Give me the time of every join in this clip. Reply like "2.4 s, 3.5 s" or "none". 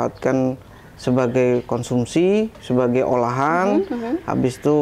none